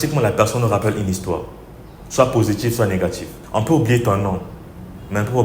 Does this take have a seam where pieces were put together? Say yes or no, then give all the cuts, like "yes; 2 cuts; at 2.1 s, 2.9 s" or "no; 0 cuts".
yes; 1 cut; at 3.3 s